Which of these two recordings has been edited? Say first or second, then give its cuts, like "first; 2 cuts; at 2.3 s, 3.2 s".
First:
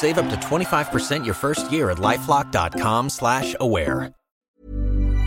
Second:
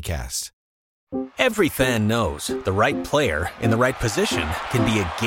second; 1 cut; at 1.0 s